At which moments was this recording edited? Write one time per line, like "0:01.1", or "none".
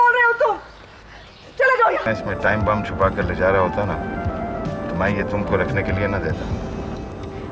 0:02.0